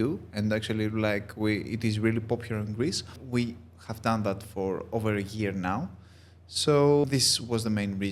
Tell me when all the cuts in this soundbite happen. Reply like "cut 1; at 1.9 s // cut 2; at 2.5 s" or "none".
cut 1; at 3.2 s // cut 2; at 7.0 s